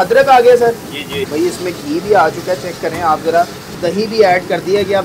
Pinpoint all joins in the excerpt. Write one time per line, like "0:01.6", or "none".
0:01.1
0:03.8